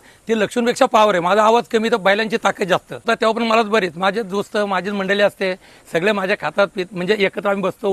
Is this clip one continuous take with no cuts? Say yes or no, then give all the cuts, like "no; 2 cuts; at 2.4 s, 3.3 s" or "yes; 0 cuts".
no; 1 cut; at 3.0 s